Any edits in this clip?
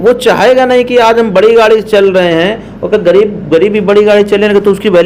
no; 0 cuts

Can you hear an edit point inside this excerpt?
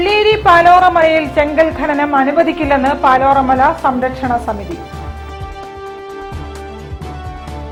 no; 0 cuts

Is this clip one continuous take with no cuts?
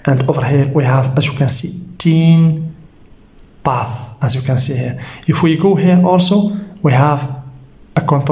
yes; 0 cuts

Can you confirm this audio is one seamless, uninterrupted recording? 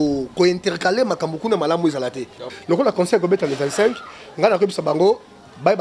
no; 1 cut; at 2.5 s

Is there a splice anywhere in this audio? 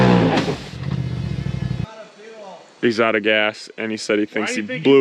yes; 1 cut; at 1.8 s

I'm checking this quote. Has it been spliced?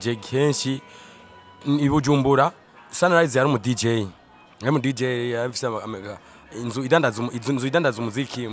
no; 0 cuts

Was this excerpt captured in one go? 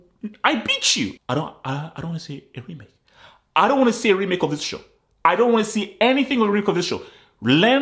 no; 1 cut; at 1.2 s

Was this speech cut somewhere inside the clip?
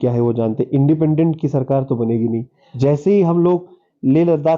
yes; 1 cut; at 2.6 s

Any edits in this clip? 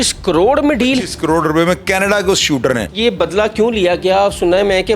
yes; 1 cut; at 2.9 s

